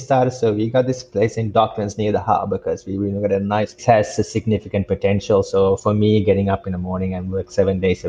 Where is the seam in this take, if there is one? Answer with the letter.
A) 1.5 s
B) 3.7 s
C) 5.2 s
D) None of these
B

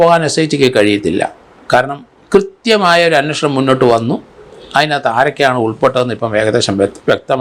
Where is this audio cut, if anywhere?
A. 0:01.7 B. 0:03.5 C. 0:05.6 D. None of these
D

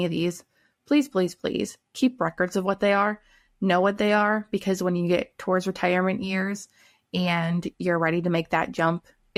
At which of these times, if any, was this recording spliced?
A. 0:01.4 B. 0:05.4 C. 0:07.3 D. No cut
D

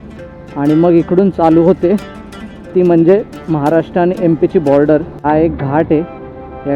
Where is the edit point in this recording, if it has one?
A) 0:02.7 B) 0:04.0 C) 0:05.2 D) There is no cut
C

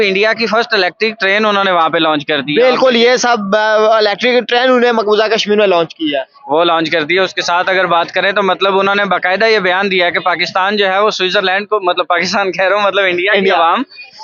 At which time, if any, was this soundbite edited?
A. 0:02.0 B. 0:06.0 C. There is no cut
C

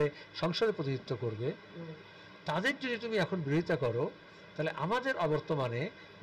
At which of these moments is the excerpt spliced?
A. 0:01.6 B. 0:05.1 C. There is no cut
C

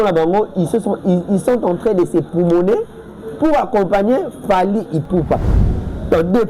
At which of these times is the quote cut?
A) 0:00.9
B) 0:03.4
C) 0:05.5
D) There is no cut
C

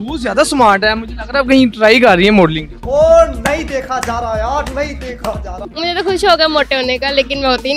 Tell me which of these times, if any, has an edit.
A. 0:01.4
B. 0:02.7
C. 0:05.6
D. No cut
C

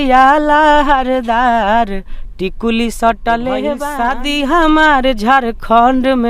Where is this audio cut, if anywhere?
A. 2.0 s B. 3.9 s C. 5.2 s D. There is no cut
B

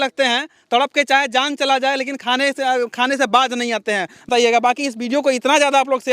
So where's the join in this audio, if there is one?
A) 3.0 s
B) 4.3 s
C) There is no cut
B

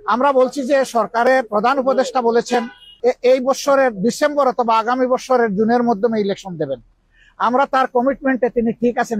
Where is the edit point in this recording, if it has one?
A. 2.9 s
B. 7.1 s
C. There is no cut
A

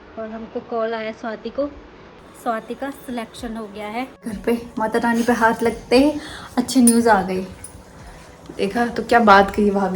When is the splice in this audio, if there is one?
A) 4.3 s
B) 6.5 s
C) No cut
A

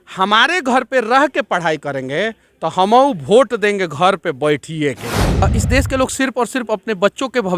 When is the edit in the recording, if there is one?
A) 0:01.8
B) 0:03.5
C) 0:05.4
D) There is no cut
C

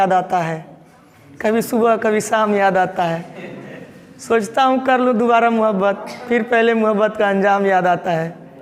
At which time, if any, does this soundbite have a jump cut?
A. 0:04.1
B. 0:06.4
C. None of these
C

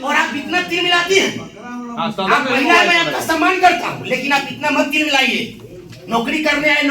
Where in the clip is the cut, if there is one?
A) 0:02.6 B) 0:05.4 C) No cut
C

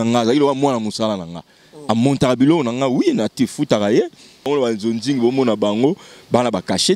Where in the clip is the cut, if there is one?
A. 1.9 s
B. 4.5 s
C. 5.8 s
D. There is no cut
B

